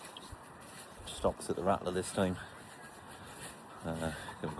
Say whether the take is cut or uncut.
uncut